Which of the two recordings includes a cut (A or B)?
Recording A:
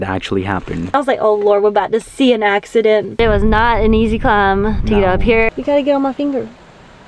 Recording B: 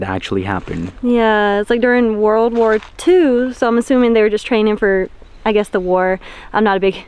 A